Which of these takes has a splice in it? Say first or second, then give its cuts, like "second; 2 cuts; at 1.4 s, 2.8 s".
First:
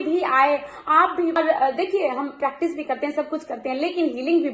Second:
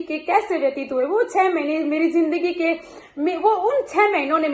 first; 1 cut; at 1.4 s